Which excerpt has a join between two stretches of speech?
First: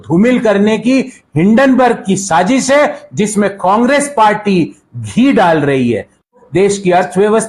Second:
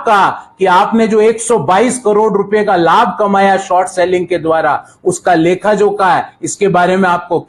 first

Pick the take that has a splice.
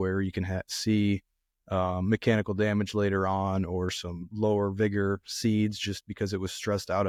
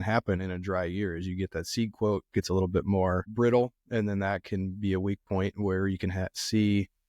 second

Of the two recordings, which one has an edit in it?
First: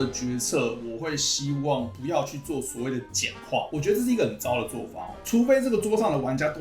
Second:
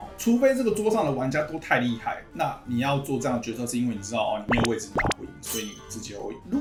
first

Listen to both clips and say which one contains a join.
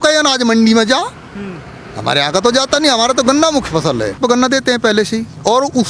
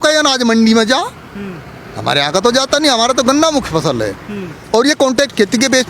first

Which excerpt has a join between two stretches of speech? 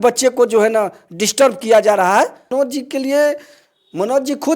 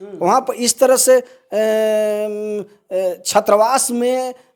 first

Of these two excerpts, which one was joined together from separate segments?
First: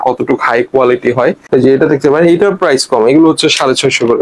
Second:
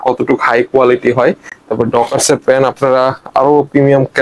first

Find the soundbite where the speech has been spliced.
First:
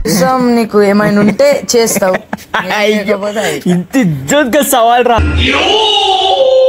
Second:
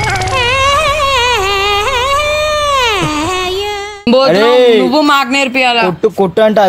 second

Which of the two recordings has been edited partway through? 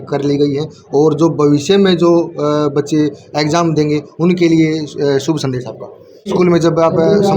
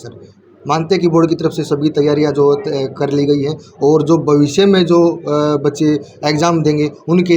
first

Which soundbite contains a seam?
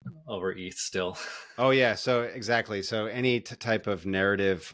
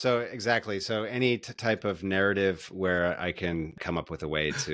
second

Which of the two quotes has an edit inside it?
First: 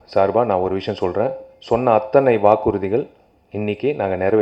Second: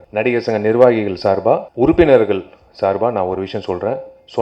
second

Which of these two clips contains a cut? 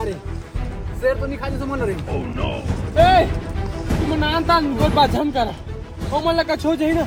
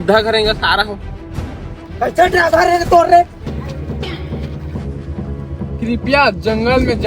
second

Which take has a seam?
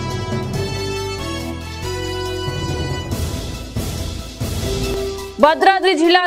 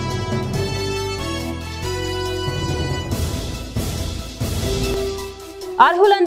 first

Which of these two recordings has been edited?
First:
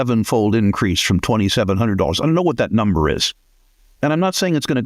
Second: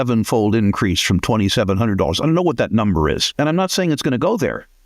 second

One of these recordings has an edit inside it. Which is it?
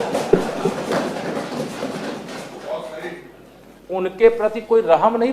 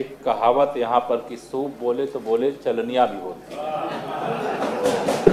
first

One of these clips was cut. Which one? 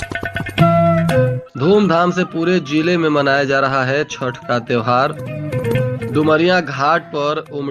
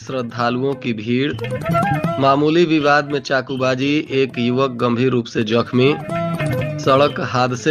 first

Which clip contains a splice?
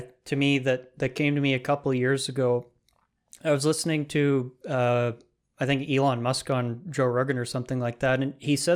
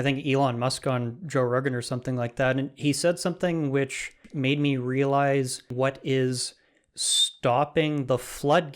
second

